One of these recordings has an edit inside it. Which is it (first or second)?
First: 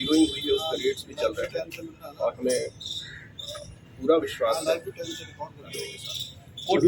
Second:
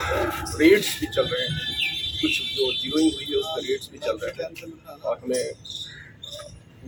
first